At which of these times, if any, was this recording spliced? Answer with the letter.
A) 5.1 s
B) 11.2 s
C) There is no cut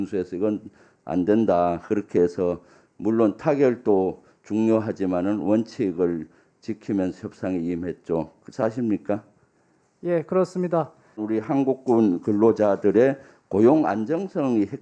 B